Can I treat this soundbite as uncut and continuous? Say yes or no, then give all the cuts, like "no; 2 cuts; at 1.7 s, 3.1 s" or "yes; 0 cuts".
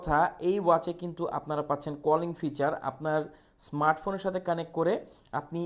yes; 0 cuts